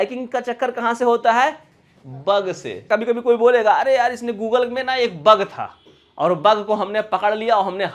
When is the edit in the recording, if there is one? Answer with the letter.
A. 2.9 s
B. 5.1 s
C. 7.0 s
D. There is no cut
A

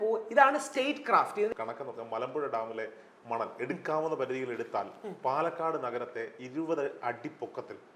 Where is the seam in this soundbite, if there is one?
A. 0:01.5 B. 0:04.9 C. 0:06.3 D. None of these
A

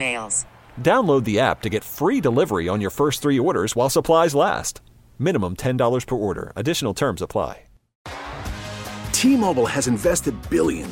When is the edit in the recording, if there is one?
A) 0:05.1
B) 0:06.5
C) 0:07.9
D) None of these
C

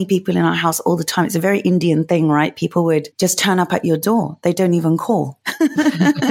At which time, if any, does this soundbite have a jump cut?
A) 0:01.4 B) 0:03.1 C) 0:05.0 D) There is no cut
B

